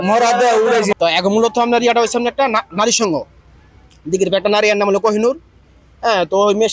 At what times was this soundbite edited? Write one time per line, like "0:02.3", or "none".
0:00.9